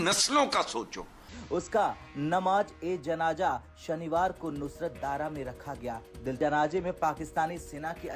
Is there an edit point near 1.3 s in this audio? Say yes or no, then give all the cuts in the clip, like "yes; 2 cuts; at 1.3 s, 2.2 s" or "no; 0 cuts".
yes; 2 cuts; at 1.3 s, 6.4 s